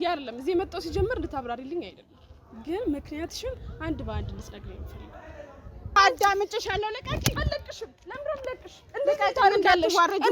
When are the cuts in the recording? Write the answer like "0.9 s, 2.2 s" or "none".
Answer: 6.0 s